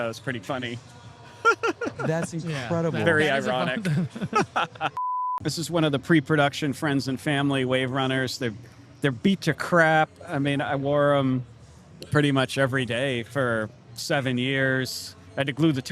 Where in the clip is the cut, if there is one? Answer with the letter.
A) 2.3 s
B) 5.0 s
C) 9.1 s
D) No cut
B